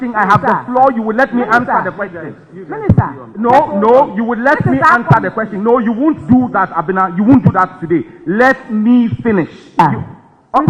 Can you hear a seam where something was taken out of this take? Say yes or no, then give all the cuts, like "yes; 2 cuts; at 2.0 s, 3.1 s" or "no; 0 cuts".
yes; 1 cut; at 9.8 s